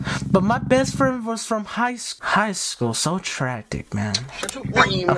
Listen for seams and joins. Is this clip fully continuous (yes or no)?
yes